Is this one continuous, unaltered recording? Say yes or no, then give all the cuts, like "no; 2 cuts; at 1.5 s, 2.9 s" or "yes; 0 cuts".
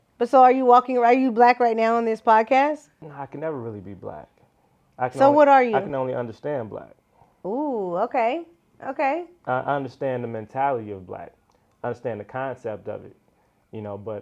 no; 1 cut; at 3.0 s